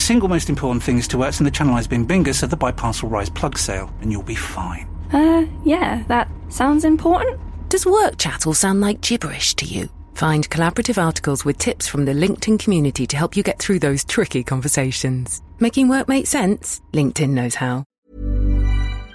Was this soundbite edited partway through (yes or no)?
yes